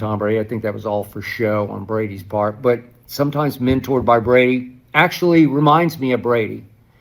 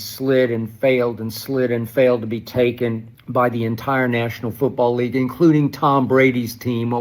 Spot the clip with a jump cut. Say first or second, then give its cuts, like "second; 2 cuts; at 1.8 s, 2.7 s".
second; 1 cut; at 3.1 s